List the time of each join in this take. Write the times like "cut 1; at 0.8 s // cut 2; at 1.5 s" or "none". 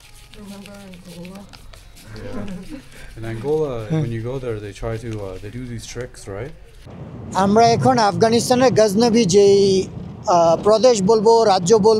cut 1; at 6.9 s